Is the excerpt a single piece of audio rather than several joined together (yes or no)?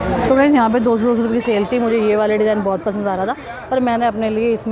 yes